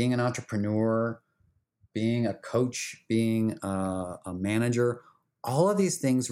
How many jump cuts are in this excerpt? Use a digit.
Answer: 1